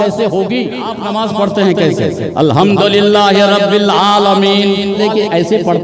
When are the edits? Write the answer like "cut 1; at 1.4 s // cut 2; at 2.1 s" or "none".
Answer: cut 1; at 1.0 s // cut 2; at 5.0 s